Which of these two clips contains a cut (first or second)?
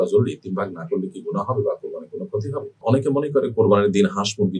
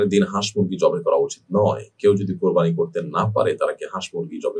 first